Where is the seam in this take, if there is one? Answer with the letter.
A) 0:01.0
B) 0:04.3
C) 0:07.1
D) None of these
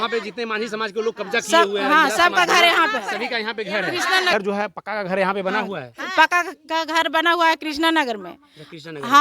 B